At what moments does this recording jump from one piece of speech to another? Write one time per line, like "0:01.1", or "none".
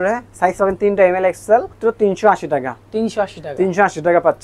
0:01.7